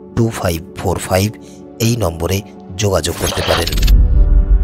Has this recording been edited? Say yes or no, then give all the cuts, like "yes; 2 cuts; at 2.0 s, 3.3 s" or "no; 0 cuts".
yes; 1 cut; at 3.7 s